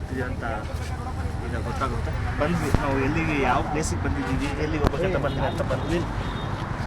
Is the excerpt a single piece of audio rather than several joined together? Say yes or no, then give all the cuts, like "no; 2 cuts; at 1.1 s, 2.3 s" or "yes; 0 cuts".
yes; 0 cuts